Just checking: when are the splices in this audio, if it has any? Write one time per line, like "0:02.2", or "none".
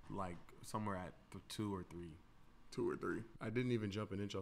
0:03.3

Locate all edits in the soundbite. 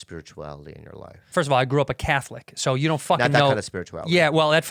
0:01.3

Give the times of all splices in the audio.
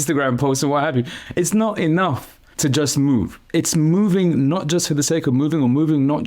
0:01.2
0:03.4

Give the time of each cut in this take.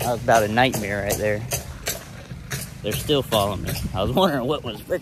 none

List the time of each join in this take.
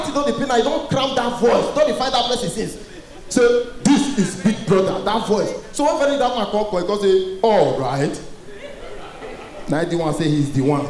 none

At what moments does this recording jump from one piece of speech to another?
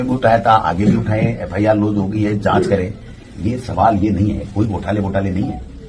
none

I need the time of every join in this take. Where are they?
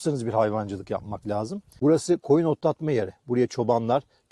0:01.6

